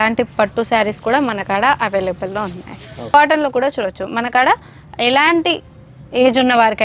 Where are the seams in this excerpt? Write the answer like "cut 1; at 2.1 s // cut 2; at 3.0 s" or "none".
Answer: cut 1; at 3.1 s

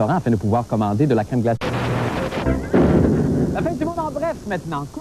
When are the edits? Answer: none

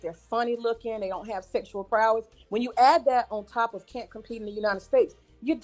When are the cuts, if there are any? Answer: cut 1; at 1.4 s // cut 2; at 2.4 s

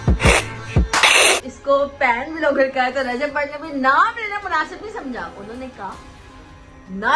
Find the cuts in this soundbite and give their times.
cut 1; at 1.5 s

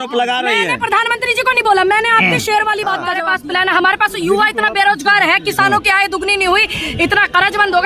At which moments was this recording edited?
cut 1; at 3.2 s

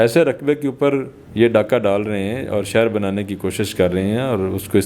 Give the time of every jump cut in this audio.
cut 1; at 1.2 s

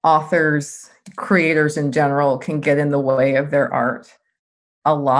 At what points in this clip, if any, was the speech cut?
none

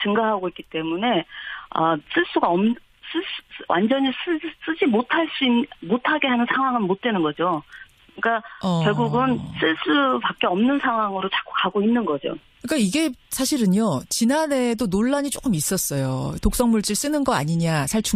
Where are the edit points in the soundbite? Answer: cut 1; at 5.6 s

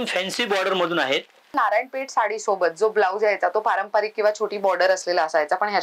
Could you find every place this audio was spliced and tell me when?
cut 1; at 1.5 s

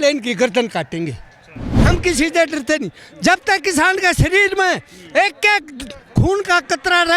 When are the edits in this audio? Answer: cut 1; at 1.7 s

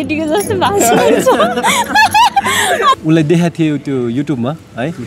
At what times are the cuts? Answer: cut 1; at 2.9 s

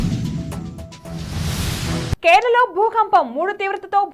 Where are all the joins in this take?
cut 1; at 2.1 s

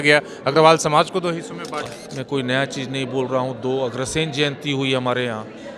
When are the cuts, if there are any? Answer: cut 1; at 1.9 s

